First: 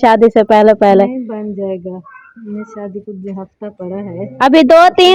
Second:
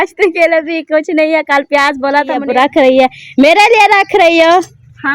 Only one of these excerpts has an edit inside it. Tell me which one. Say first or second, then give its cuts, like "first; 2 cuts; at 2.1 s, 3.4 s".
second; 1 cut; at 2.4 s